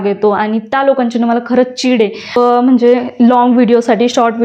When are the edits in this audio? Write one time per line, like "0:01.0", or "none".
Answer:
0:02.4